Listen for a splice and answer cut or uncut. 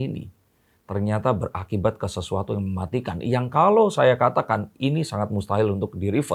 uncut